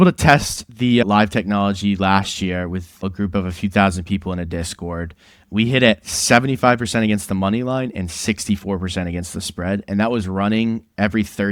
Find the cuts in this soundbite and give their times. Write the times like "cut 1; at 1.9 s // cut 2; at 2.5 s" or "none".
cut 1; at 3.0 s // cut 2; at 5.3 s